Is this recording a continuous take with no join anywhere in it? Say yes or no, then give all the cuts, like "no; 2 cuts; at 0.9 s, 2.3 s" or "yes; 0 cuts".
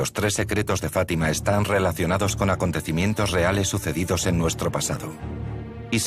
yes; 0 cuts